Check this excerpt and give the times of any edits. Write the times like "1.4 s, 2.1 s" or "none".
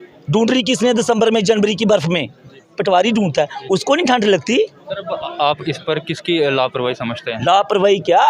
none